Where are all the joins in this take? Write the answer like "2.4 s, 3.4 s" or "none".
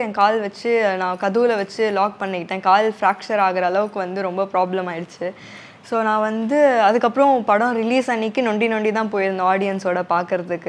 none